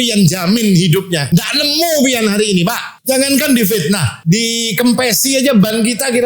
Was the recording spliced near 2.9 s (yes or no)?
yes